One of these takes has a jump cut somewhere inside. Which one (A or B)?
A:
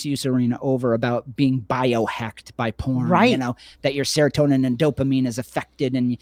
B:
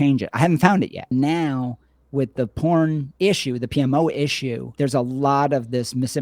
B